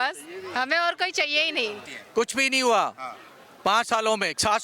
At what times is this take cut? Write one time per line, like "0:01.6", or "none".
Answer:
0:02.0